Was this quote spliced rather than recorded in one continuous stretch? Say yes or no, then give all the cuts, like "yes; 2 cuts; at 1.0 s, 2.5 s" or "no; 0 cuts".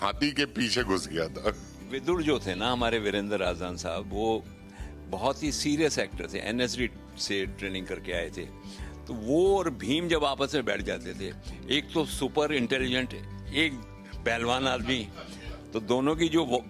yes; 1 cut; at 2.0 s